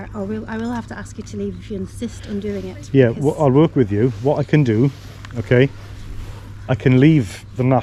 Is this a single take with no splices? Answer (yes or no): yes